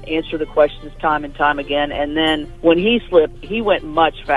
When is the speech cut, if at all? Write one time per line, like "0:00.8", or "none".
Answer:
0:02.5
0:03.5